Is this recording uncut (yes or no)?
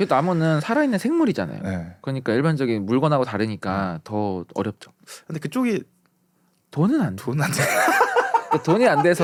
yes